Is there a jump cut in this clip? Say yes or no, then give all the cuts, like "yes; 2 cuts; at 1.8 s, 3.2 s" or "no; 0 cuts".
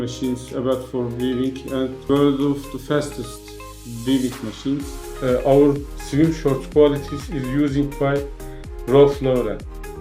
yes; 1 cut; at 5.0 s